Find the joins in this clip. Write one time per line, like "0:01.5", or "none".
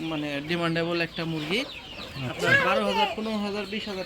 none

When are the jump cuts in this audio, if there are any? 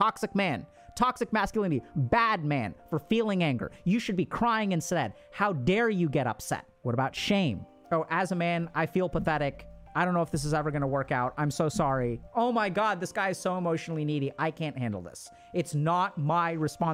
none

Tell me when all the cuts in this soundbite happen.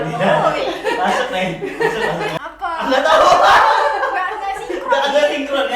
0:02.4

